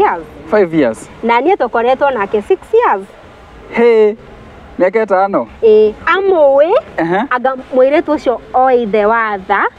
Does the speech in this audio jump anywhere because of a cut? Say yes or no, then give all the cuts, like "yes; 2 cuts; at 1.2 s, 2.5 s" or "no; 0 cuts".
no; 0 cuts